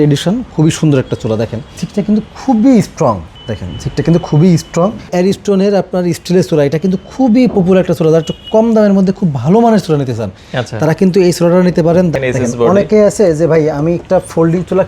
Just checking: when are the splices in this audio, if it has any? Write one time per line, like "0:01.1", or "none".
0:01.8
0:03.3
0:05.1
0:12.1